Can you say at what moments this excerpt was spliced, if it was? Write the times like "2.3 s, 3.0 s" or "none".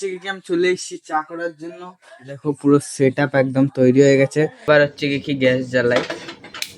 4.6 s